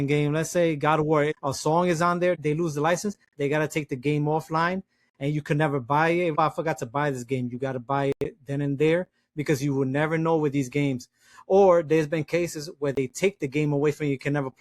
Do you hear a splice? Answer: yes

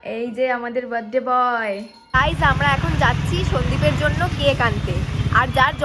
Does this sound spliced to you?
yes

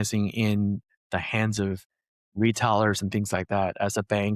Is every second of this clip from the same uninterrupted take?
yes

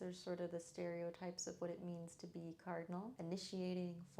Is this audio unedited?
no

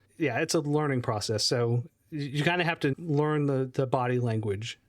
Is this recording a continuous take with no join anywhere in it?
no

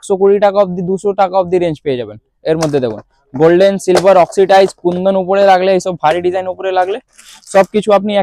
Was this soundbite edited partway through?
no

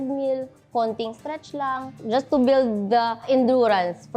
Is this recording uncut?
no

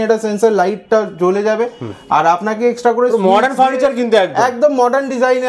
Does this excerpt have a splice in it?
no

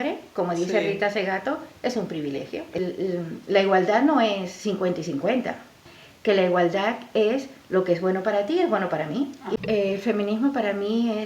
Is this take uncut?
no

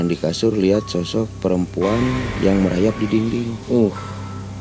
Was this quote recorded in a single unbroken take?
yes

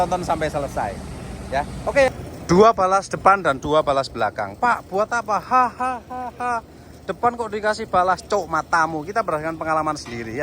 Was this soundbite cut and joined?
yes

